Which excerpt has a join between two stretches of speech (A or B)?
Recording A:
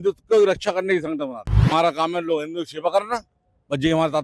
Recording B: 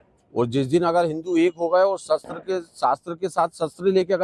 A